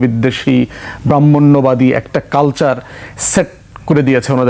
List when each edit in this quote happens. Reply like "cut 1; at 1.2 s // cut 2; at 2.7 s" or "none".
none